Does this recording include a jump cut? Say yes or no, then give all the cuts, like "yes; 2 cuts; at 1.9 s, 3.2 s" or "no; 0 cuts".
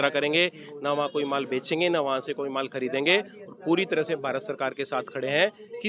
no; 0 cuts